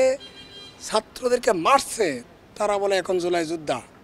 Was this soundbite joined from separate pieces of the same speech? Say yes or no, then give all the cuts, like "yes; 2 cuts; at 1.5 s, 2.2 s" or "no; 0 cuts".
no; 0 cuts